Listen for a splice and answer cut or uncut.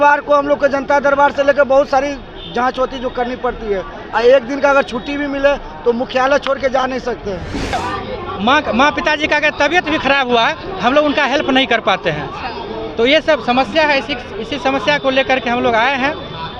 cut